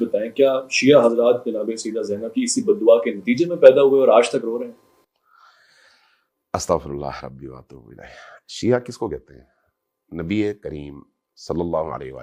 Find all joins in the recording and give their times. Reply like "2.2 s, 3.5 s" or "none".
none